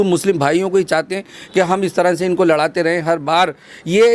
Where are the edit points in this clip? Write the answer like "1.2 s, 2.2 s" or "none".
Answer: none